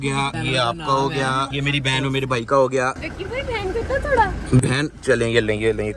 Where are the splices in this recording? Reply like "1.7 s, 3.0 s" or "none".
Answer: none